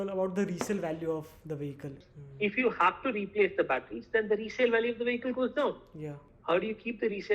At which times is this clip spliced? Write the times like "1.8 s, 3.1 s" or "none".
2.1 s, 6.2 s